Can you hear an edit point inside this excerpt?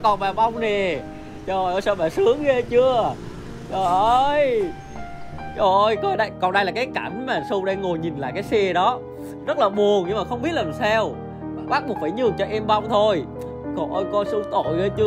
no; 0 cuts

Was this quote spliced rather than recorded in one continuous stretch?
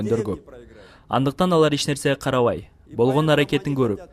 yes; 1 cut; at 1.2 s

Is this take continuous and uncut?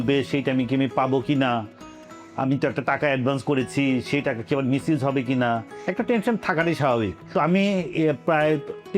yes; 0 cuts

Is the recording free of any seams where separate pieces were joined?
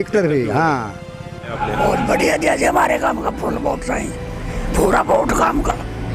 no; 1 cut; at 1.6 s

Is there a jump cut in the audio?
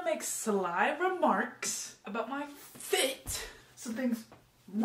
no; 0 cuts

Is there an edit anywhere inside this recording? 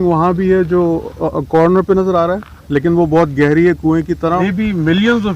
yes; 1 cut; at 4.4 s

